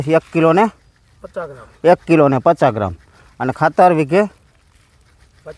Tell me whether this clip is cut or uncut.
uncut